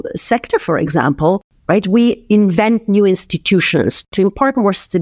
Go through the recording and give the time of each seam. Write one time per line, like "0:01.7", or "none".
0:01.5
0:04.1